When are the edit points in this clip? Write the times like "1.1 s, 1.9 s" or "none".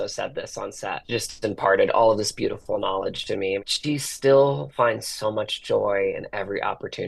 1.0 s, 3.7 s